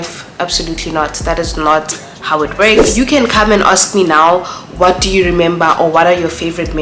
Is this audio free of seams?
no; 1 cut; at 2.9 s

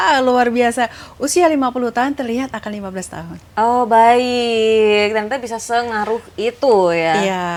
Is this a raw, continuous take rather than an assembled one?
yes; 0 cuts

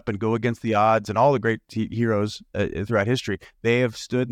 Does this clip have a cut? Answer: no; 0 cuts

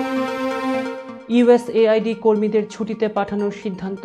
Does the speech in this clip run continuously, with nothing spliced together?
yes; 0 cuts

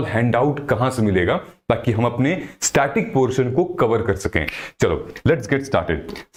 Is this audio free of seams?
yes; 0 cuts

